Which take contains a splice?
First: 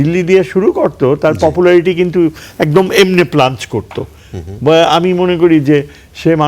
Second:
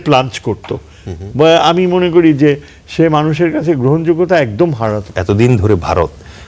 second; 1 cut; at 5.1 s

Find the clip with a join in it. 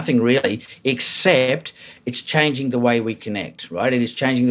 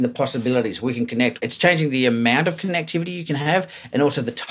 second; 2 cuts; at 1.4 s, 3.2 s

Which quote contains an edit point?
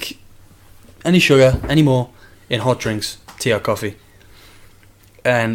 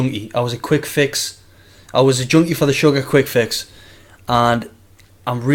second; 1 cut; at 2.7 s

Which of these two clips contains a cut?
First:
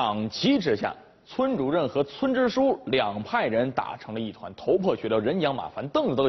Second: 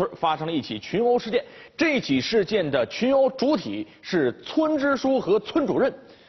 first; 1 cut; at 4.9 s

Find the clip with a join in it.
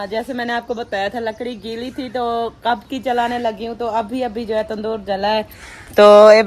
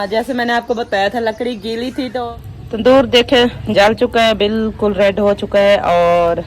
second; 1 cut; at 2.2 s

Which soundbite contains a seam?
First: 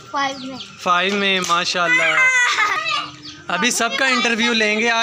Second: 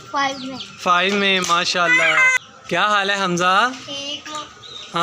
second; 1 cut; at 2.4 s

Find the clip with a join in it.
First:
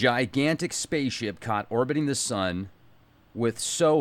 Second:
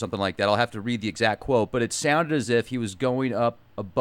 second; 1 cut; at 2.5 s

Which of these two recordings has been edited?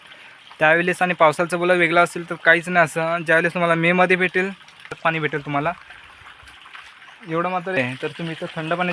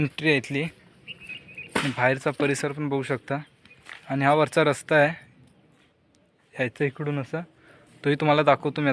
first; 2 cuts; at 4.9 s, 7.8 s

